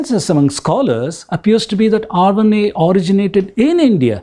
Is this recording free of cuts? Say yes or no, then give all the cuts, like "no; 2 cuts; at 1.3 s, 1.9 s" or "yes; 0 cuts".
yes; 0 cuts